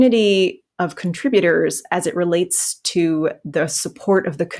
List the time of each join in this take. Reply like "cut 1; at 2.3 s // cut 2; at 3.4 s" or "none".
none

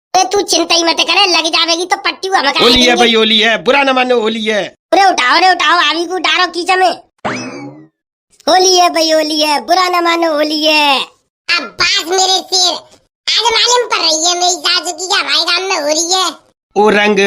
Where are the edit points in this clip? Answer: cut 1; at 2.5 s

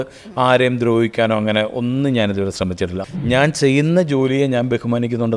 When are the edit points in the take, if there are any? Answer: cut 1; at 3.0 s

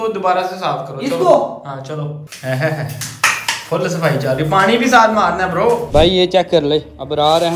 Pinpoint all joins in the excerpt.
cut 1; at 2.2 s // cut 2; at 5.8 s

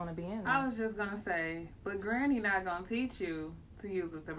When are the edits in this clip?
none

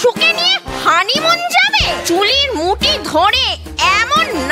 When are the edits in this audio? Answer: cut 1; at 2.0 s

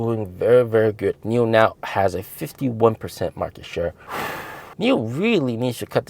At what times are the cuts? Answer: cut 1; at 1.1 s // cut 2; at 4.5 s

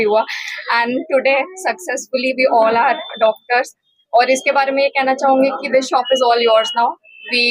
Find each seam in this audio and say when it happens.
none

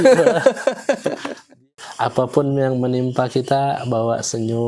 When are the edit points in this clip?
cut 1; at 1.6 s

